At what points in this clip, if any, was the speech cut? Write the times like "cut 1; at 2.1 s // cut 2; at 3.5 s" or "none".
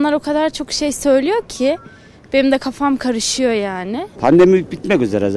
cut 1; at 4.1 s